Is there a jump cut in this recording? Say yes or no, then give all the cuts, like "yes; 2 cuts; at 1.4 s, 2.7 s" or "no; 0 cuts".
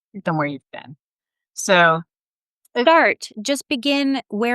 yes; 1 cut; at 2.7 s